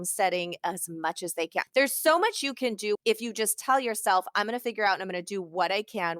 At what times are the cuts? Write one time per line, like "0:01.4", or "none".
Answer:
0:01.7
0:03.0